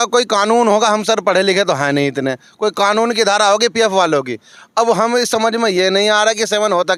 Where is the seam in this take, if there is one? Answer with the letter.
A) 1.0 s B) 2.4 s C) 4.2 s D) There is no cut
D